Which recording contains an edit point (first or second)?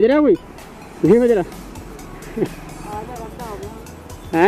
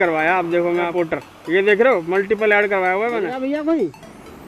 second